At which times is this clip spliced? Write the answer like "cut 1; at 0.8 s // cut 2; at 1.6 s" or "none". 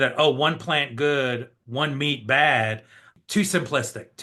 cut 1; at 3.2 s